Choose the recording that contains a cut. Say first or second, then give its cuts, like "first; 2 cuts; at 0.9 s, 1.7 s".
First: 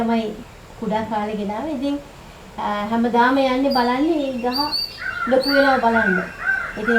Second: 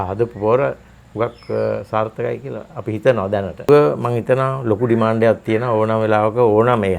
second; 1 cut; at 3.7 s